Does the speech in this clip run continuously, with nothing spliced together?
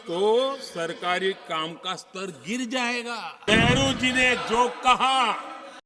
no; 1 cut; at 3.4 s

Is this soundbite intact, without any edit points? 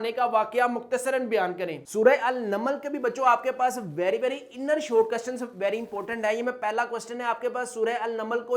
no; 1 cut; at 1.8 s

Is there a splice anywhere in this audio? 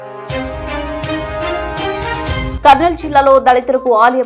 yes; 2 cuts; at 0.7 s, 2.5 s

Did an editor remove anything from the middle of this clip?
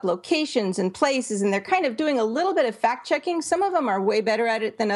no; 0 cuts

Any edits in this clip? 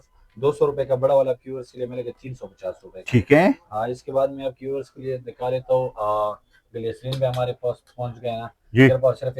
no; 0 cuts

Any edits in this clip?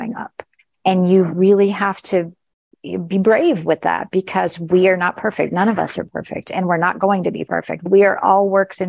yes; 1 cut; at 7.9 s

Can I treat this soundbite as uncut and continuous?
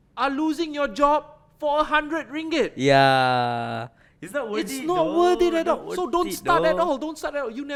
yes; 0 cuts

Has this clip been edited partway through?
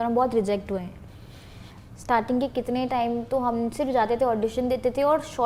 no; 0 cuts

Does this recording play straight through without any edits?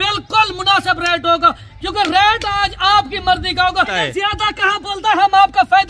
no; 1 cut; at 3.9 s

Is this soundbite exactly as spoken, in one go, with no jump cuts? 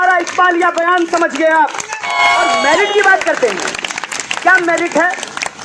no; 1 cut; at 2.1 s

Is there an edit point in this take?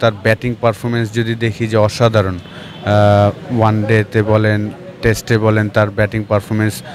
no; 0 cuts

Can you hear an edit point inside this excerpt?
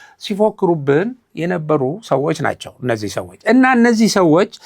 no; 0 cuts

